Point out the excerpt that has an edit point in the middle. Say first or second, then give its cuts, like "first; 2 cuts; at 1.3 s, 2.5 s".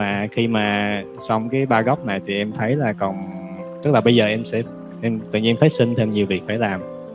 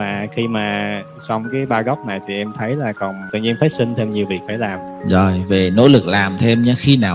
second; 2 cuts; at 3.2 s, 4.9 s